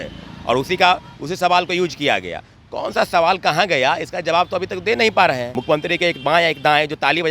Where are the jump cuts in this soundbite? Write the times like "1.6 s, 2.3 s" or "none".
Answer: 5.5 s